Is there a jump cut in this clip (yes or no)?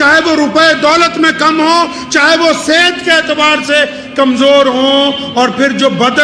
no